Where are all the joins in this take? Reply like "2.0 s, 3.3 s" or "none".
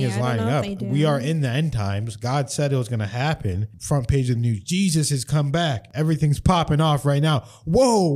3.7 s, 5.9 s